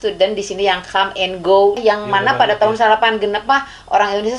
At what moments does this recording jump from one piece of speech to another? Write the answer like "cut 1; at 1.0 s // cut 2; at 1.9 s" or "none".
cut 1; at 1.8 s